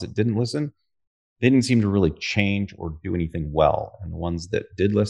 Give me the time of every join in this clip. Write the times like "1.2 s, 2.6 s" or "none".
none

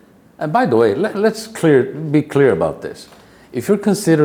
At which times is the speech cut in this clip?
none

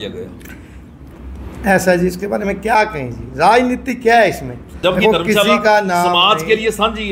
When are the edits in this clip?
4.8 s

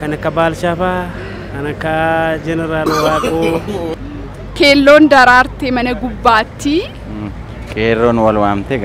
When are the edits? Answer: 4.0 s

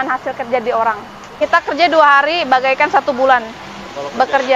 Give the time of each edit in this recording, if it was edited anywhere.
1.2 s

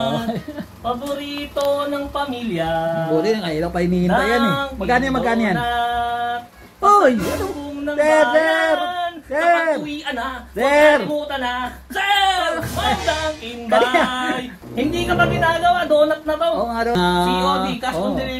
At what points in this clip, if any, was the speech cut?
14.5 s, 16.9 s

